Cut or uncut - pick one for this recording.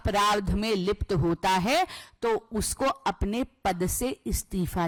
uncut